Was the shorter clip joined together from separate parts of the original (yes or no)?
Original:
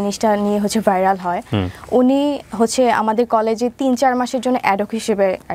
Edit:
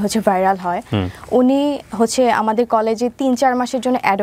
no